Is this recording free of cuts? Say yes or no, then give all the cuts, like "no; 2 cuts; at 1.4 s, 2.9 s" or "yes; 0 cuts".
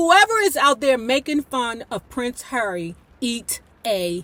yes; 0 cuts